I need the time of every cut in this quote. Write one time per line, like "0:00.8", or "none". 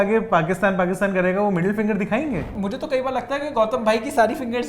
0:02.6